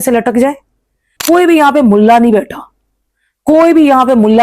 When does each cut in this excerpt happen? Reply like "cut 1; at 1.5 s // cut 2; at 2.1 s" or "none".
cut 1; at 1.1 s